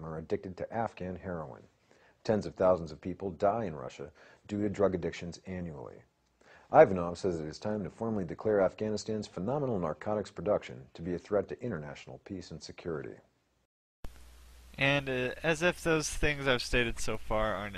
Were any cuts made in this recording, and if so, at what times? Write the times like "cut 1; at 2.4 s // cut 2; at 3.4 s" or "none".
none